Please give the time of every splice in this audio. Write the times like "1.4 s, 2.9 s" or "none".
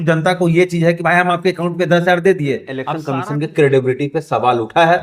2.9 s